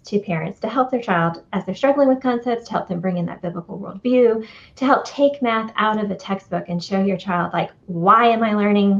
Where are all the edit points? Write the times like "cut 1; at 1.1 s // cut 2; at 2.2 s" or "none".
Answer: none